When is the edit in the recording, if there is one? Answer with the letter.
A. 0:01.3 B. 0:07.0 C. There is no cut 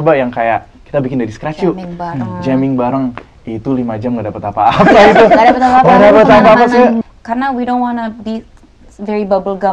B